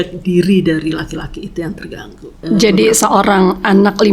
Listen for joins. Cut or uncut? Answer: cut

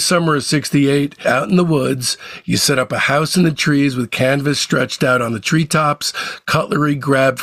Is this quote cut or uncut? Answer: cut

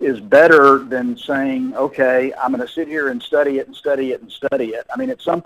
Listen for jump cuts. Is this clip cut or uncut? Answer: uncut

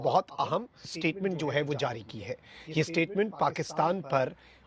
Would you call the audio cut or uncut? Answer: cut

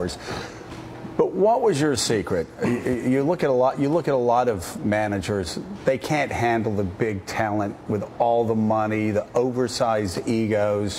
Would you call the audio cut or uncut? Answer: cut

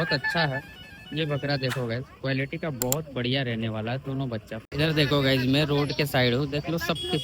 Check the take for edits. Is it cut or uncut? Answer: cut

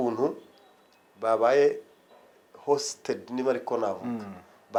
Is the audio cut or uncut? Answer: uncut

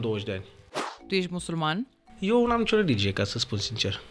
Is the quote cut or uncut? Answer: cut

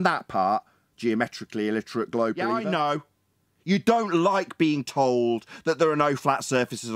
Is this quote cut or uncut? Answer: cut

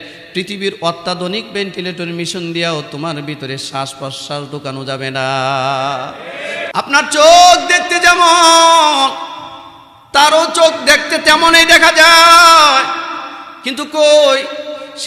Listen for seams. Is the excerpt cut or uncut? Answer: cut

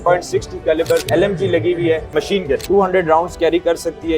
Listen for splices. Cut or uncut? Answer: cut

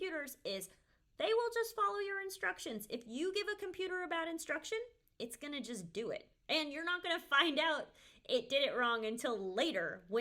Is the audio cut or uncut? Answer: uncut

